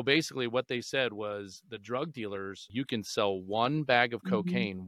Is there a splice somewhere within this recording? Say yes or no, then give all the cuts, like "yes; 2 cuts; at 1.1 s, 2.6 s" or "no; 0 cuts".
yes; 1 cut; at 2.7 s